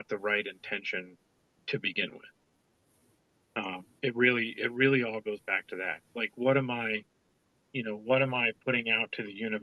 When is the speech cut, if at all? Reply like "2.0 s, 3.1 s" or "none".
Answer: none